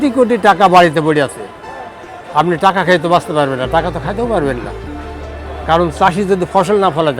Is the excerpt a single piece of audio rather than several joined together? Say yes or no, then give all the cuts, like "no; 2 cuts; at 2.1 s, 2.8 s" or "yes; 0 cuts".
yes; 0 cuts